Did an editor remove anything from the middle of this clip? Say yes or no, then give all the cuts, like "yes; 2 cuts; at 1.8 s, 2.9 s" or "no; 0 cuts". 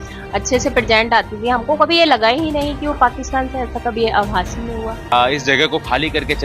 yes; 1 cut; at 5.1 s